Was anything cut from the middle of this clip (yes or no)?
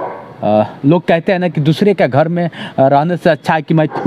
no